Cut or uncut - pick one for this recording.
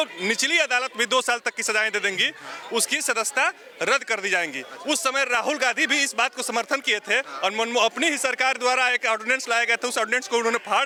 uncut